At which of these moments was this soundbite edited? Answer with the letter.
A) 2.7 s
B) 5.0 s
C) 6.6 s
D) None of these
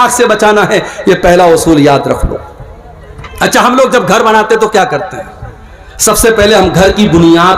D